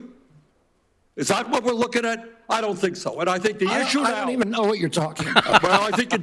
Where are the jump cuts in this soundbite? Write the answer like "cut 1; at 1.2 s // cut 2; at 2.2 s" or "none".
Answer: none